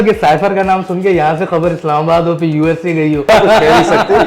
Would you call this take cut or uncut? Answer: cut